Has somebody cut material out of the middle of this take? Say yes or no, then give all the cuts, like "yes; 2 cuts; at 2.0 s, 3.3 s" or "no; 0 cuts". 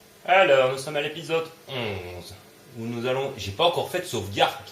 yes; 1 cut; at 2.1 s